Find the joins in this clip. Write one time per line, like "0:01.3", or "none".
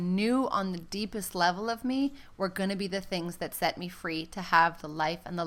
none